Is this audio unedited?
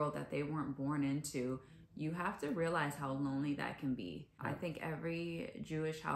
no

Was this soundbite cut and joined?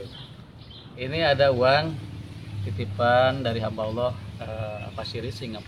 yes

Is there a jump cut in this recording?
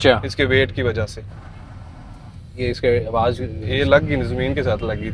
yes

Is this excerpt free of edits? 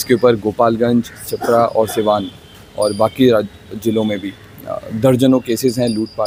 yes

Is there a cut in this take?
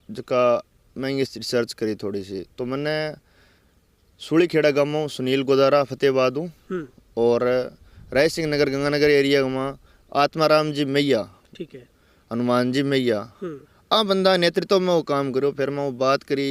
no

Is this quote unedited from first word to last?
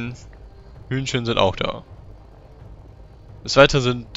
yes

